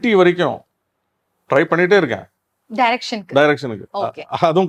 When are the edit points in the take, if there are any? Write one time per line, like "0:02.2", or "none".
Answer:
none